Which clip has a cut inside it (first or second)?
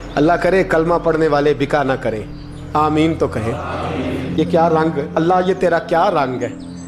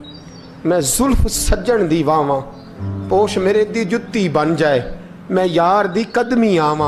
first